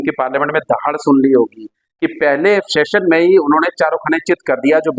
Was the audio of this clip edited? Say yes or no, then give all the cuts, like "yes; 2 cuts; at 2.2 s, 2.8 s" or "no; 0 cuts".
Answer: no; 0 cuts